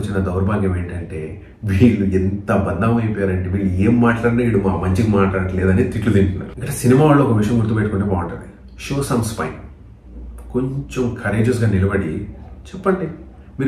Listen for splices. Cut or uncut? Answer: uncut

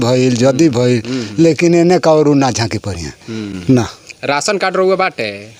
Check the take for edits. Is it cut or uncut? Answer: uncut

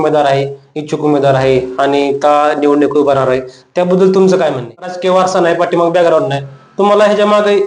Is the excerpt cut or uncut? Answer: cut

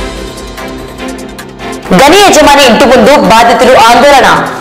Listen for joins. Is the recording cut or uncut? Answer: cut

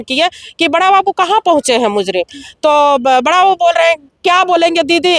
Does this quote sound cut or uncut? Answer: uncut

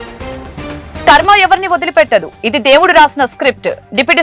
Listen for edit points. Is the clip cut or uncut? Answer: cut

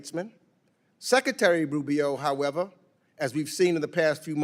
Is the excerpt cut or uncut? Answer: uncut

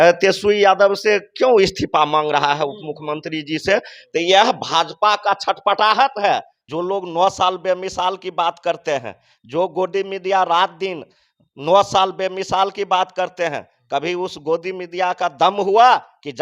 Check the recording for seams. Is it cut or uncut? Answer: cut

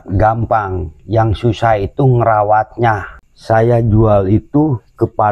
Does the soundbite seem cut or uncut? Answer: cut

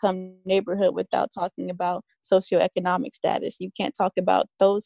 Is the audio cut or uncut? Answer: uncut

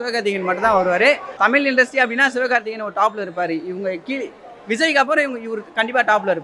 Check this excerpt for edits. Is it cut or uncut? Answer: cut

